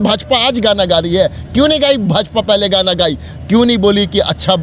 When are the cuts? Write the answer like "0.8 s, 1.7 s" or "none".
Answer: none

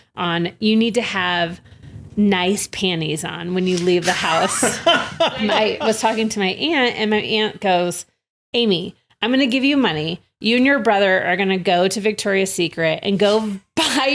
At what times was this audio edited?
5.3 s

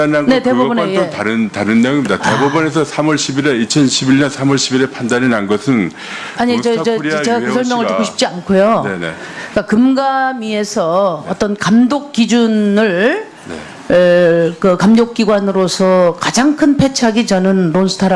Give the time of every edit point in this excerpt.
10.0 s

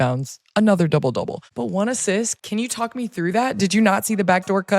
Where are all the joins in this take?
1.4 s, 2.3 s

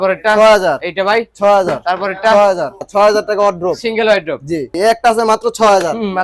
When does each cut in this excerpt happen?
2.8 s, 4.7 s

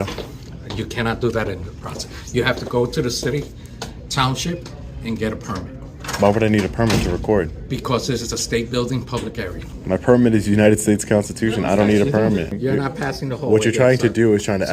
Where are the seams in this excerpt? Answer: 9.7 s, 12.5 s

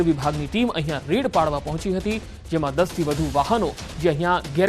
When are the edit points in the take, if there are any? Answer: 1.8 s

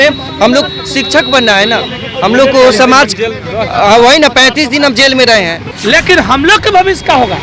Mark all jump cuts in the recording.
5.6 s

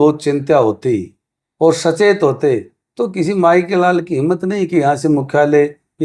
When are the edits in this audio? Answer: none

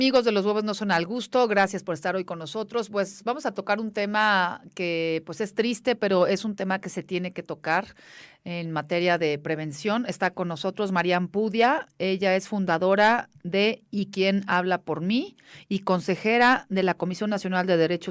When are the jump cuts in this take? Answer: none

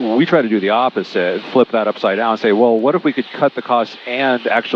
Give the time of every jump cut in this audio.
none

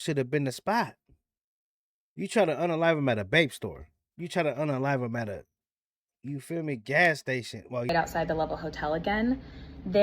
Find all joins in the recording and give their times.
7.9 s

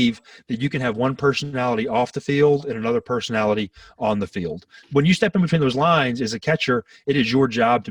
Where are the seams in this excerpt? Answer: 4.8 s

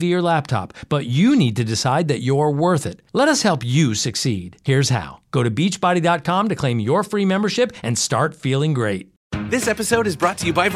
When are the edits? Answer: 9.2 s

